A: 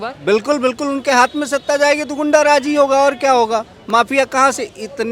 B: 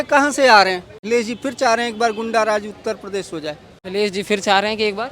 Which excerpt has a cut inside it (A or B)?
B